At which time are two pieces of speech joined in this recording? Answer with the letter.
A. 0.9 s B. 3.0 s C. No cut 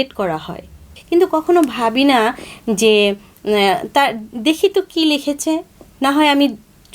A